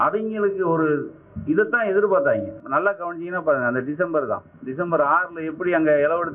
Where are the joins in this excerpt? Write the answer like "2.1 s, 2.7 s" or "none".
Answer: 2.6 s

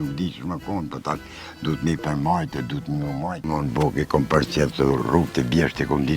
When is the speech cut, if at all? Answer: 3.7 s

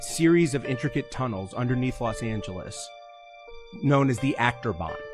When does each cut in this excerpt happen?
none

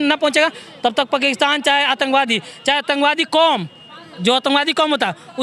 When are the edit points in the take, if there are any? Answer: none

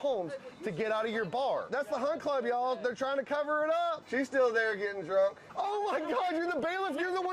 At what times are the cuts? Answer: 1.7 s, 4.0 s, 5.4 s

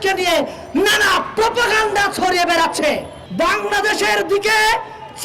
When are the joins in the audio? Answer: 3.2 s

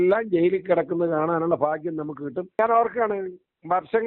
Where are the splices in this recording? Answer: 2.6 s

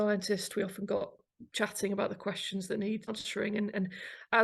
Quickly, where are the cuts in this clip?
1.2 s, 3.1 s

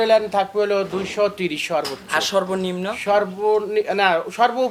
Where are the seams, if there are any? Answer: none

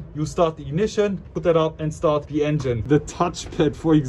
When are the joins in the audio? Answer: 1.3 s, 2.8 s

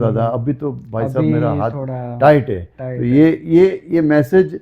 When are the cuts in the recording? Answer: none

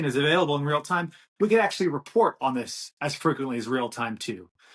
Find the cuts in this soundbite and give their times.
none

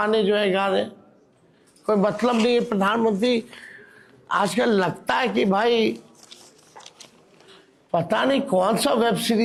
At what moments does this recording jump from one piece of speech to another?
none

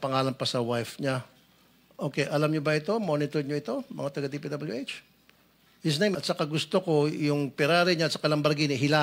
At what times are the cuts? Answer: 6.1 s

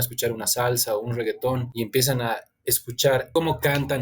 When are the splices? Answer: 1.7 s, 3.3 s

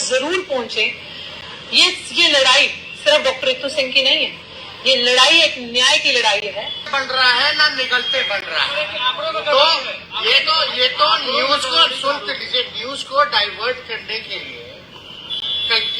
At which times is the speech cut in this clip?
6.9 s

